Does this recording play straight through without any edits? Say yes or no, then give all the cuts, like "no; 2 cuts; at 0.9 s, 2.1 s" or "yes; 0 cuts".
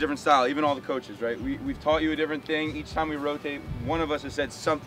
yes; 0 cuts